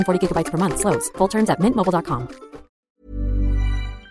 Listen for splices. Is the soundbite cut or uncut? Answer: cut